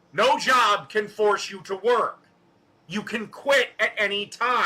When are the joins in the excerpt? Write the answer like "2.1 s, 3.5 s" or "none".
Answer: 3.3 s

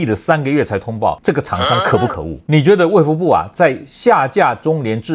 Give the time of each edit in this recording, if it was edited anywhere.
2.3 s

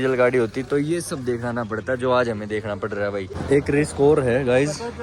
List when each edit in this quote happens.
3.3 s

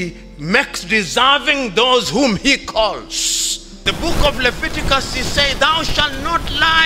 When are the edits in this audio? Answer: 3.8 s

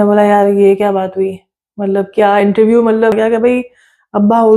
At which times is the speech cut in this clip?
3.2 s

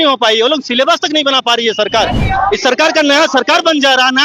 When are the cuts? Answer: none

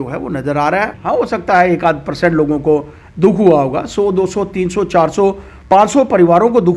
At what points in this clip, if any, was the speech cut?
0.9 s

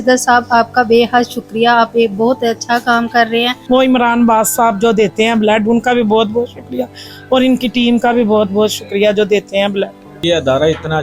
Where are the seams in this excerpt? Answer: 3.6 s, 10.2 s

